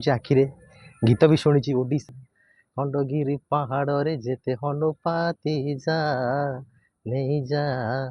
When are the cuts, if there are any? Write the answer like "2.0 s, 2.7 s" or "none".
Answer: 2.0 s